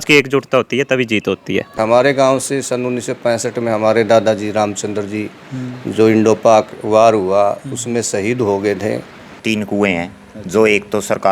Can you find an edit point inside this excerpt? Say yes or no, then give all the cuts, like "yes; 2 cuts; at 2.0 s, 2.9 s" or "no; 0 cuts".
yes; 2 cuts; at 1.8 s, 9.4 s